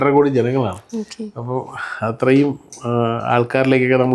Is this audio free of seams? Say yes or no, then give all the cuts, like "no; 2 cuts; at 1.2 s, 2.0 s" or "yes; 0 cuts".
yes; 0 cuts